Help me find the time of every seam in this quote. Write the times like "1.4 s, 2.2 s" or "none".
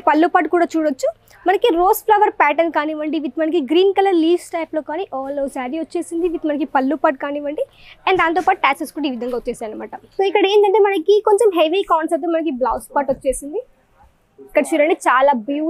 10.0 s